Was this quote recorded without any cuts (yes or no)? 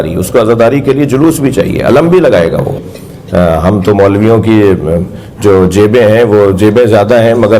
no